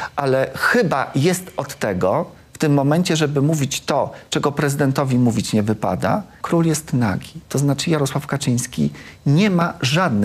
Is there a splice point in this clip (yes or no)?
yes